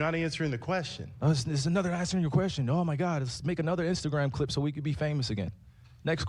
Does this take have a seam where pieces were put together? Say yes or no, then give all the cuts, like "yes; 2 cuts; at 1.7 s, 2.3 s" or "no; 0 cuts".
yes; 1 cut; at 1.8 s